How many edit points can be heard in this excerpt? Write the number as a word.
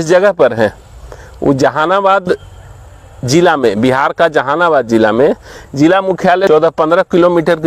one